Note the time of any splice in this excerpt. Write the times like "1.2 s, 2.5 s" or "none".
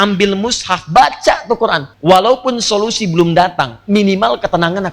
1.9 s

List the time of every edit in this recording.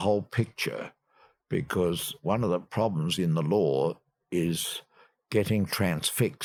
none

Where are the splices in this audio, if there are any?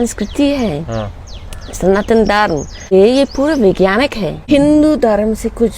2.9 s, 4.3 s

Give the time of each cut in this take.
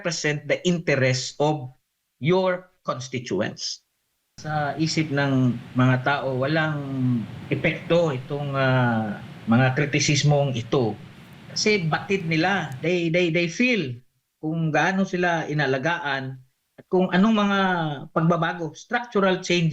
4.4 s

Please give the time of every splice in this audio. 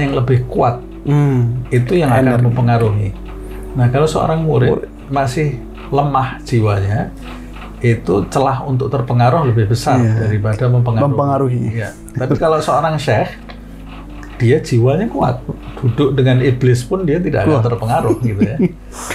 none

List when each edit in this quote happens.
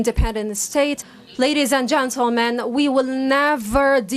1.1 s

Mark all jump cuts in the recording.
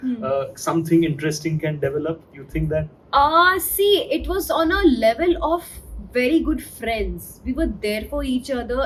none

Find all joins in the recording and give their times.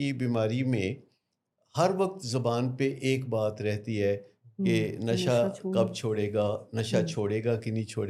none

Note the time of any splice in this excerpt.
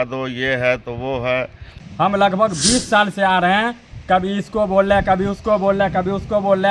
1.9 s

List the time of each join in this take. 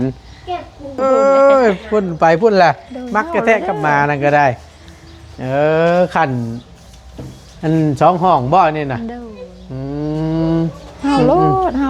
0.9 s

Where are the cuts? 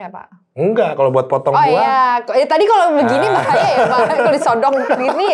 none

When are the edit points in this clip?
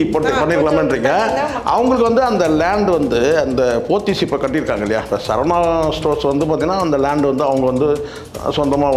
none

